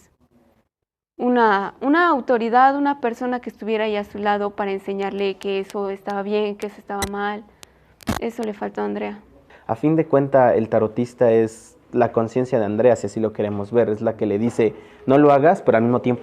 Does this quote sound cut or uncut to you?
cut